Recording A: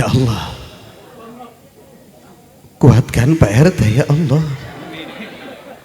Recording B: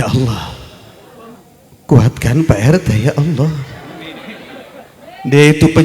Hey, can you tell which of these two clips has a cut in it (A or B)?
B